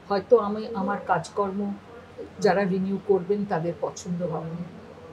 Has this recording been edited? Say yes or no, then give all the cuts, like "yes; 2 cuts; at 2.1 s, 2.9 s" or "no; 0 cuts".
no; 0 cuts